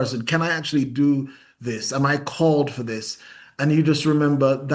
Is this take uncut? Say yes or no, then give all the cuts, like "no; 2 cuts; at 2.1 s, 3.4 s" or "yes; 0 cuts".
yes; 0 cuts